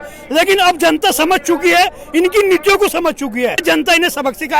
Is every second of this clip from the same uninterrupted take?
no; 1 cut; at 3.6 s

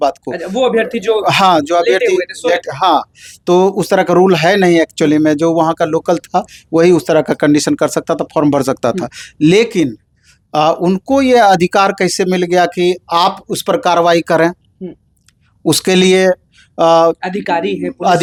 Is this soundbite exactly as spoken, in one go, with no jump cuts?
yes; 0 cuts

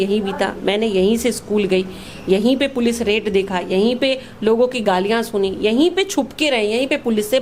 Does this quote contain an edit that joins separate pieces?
no; 0 cuts

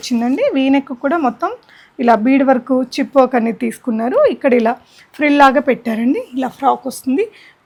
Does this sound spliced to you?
no; 0 cuts

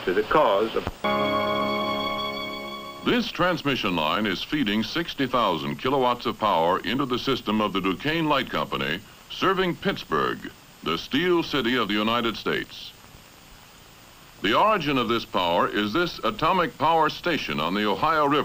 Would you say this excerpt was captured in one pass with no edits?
no; 1 cut; at 3.8 s

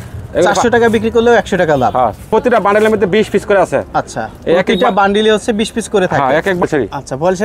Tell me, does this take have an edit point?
yes; 2 cuts; at 2.3 s, 6.6 s

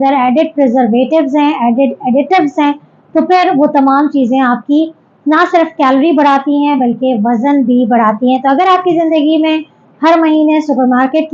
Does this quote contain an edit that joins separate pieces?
no; 0 cuts

